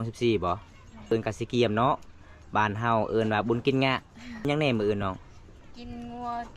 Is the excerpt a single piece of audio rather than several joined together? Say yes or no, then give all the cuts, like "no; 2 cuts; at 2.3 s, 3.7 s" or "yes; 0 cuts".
no; 2 cuts; at 1.1 s, 4.5 s